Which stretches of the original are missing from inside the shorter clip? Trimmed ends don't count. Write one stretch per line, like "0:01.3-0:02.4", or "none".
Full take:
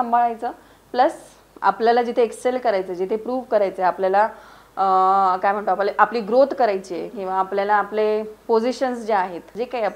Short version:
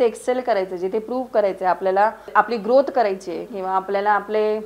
0:04.5-0:05.9